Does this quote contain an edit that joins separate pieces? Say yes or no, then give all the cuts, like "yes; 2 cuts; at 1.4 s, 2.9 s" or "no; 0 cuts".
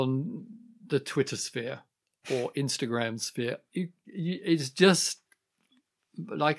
no; 0 cuts